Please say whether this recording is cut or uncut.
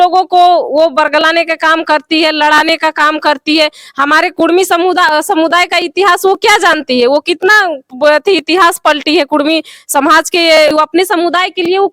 cut